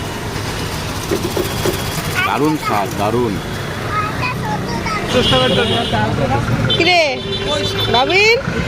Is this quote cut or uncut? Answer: uncut